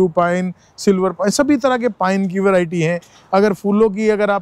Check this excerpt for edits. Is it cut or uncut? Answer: uncut